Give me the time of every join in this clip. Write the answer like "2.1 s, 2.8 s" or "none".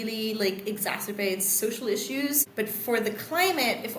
2.5 s